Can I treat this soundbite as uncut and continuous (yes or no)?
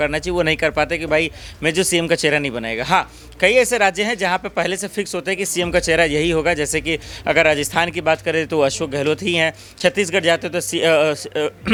yes